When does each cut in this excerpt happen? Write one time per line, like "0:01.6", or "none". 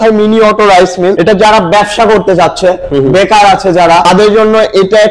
0:01.2
0:04.0